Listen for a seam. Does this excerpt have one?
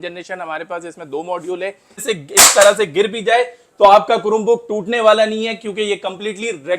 yes; 1 cut; at 1.9 s

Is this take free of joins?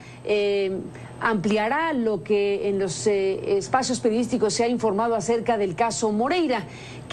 no; 1 cut; at 2.8 s

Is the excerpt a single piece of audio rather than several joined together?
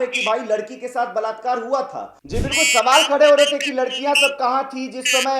no; 1 cut; at 2.1 s

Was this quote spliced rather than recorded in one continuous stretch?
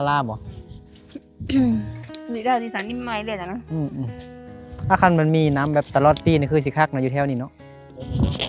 no; 0 cuts

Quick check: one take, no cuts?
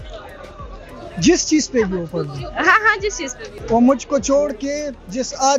no; 1 cut; at 3.5 s

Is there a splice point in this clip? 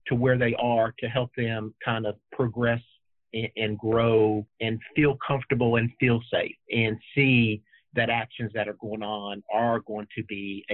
yes; 1 cut; at 4.5 s

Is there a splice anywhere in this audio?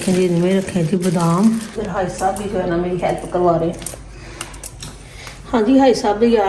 yes; 1 cut; at 1.8 s

